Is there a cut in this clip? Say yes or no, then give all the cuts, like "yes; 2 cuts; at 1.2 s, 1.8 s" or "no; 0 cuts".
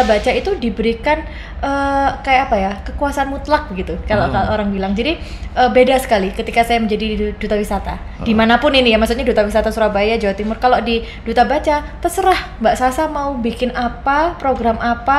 no; 0 cuts